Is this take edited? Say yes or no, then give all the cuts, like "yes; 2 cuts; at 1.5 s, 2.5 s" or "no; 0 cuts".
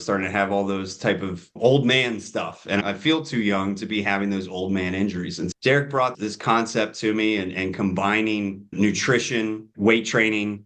yes; 1 cut; at 2.8 s